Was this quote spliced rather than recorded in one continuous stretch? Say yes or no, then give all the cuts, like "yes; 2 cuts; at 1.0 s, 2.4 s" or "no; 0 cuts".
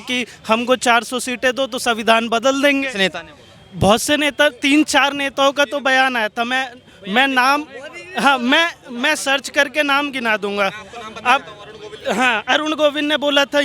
no; 0 cuts